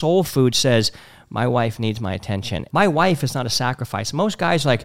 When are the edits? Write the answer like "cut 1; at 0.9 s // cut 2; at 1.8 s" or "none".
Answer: cut 1; at 2.6 s